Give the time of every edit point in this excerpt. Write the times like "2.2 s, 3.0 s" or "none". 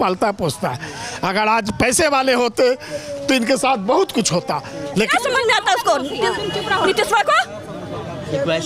5.1 s

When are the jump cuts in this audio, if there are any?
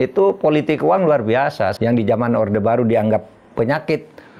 1.7 s

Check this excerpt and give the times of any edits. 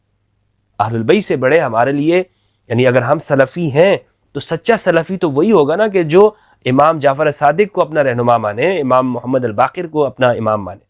none

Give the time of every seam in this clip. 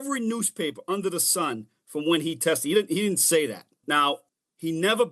none

